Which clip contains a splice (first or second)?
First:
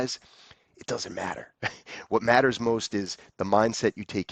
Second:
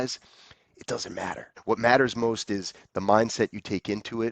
second